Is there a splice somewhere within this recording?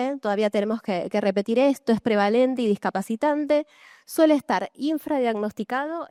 no; 0 cuts

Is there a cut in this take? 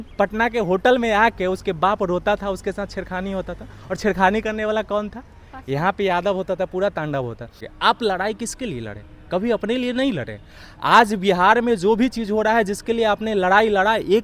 yes; 1 cut; at 7.6 s

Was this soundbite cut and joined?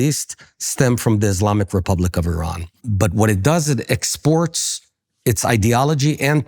yes; 1 cut; at 2.8 s

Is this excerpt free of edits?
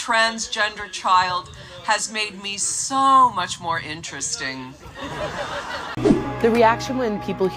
no; 1 cut; at 5.8 s

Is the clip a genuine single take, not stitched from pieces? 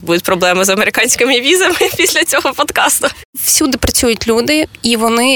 no; 1 cut; at 3.2 s

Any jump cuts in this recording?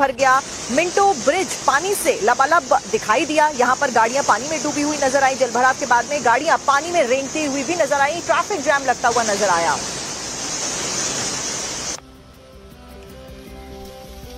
no; 0 cuts

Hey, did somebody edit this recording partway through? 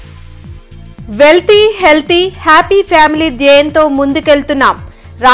yes; 1 cut; at 1.0 s

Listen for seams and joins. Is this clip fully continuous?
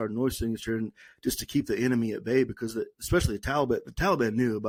yes; 0 cuts

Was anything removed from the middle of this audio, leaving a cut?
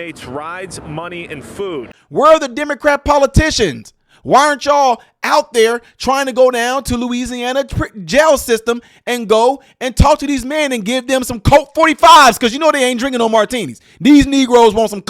yes; 1 cut; at 1.9 s

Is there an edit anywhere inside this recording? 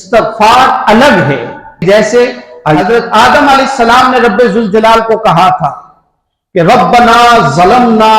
yes; 1 cut; at 1.8 s

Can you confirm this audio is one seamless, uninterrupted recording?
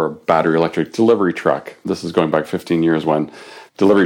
yes; 0 cuts

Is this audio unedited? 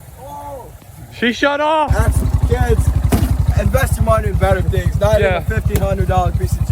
no; 1 cut; at 1.9 s

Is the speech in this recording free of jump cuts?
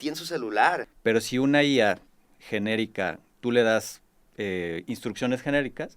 no; 1 cut; at 0.9 s

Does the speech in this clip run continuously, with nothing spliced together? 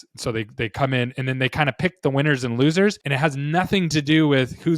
no; 1 cut; at 3.1 s

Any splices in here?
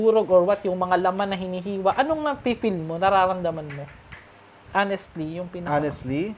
no; 0 cuts

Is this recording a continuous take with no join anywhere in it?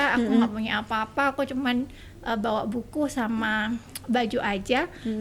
yes; 0 cuts

